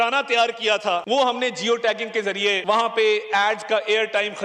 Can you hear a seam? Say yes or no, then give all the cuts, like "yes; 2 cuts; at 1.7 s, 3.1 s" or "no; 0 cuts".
yes; 2 cuts; at 1.0 s, 2.6 s